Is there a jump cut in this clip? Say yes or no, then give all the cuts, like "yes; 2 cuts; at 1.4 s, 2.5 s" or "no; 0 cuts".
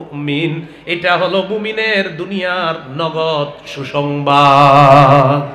no; 0 cuts